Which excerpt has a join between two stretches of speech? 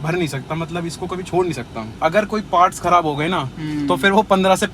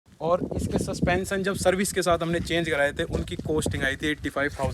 first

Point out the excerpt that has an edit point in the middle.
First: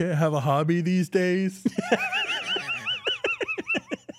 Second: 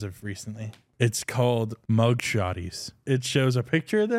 second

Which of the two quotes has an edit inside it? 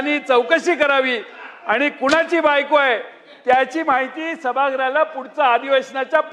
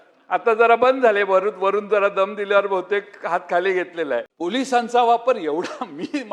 second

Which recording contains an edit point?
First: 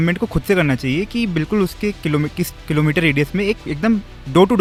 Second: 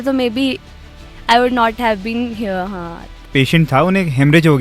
second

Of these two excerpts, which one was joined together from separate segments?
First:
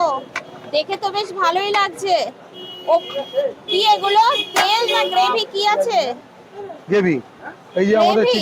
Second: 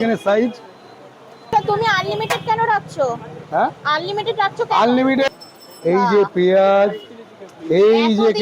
second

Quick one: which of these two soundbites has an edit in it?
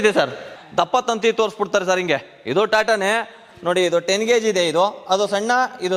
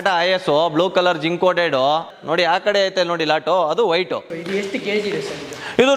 second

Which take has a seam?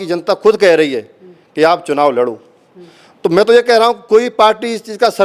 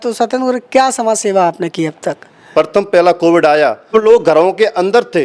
second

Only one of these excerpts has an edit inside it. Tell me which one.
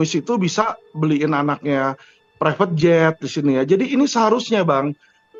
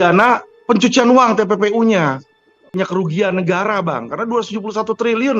second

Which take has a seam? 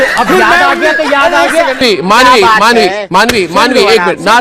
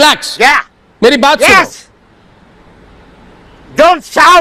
first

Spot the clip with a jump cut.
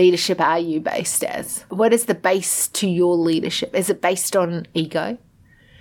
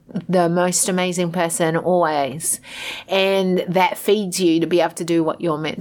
first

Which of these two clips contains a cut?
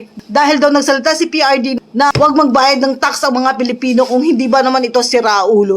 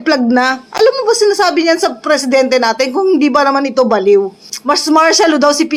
first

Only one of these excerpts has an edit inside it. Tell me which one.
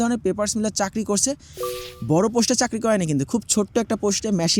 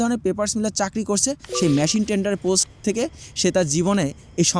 second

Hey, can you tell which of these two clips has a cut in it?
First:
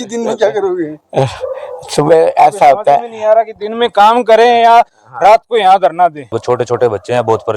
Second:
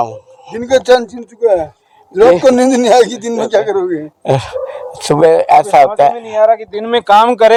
first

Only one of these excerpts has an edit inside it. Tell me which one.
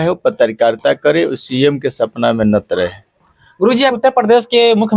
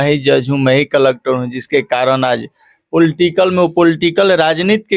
first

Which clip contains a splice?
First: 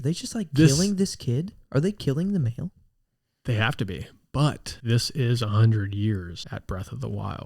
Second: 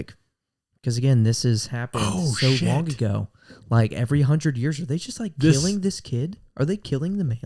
first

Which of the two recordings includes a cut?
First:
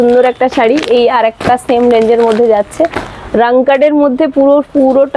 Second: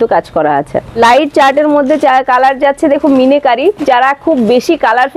second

